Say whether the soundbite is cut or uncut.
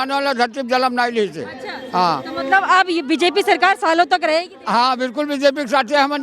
uncut